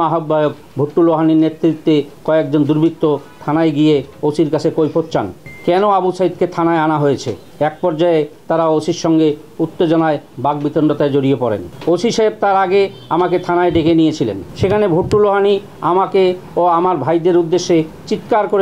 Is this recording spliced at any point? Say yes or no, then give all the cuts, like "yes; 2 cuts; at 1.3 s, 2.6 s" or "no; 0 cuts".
no; 0 cuts